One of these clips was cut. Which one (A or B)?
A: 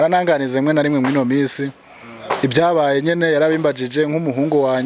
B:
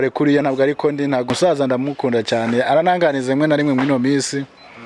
B